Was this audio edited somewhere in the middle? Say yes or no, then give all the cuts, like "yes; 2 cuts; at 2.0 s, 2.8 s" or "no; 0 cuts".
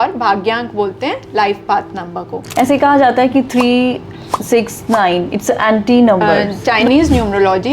yes; 2 cuts; at 2.4 s, 6.6 s